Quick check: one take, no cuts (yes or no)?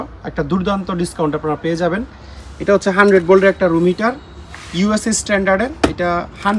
yes